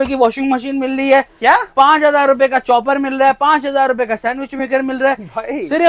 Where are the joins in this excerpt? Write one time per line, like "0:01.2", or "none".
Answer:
none